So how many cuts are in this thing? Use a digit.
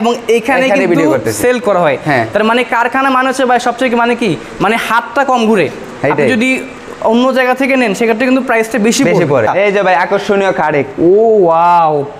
1